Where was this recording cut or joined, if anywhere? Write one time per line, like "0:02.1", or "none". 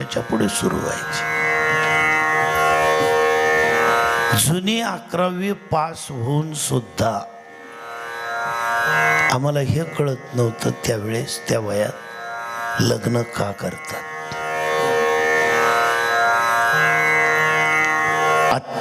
none